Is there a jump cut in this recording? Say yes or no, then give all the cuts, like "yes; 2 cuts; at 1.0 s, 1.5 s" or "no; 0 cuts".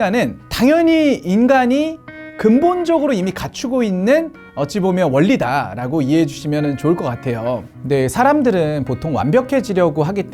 yes; 1 cut; at 7.7 s